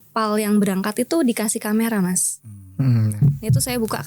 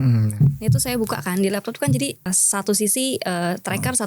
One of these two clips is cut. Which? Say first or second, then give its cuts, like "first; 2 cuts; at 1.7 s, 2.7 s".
second; 1 cut; at 2.3 s